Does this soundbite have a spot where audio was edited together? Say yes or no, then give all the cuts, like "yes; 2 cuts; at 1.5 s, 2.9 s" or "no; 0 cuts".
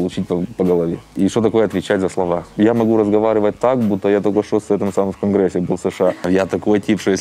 yes; 3 cuts; at 1.0 s, 2.6 s, 6.2 s